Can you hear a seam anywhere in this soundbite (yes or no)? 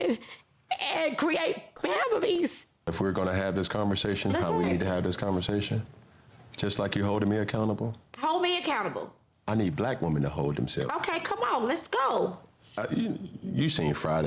yes